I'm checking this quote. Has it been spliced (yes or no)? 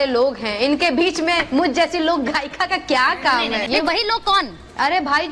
yes